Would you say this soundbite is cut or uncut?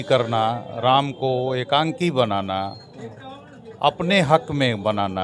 uncut